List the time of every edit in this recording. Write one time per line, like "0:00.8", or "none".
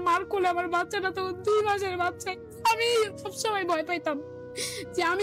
0:02.2
0:03.3